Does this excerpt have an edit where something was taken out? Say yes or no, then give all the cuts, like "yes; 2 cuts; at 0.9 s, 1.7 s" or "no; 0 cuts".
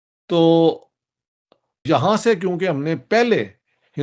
yes; 1 cut; at 1.7 s